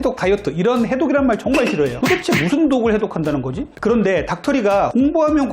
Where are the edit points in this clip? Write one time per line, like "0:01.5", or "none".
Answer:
0:01.9
0:03.7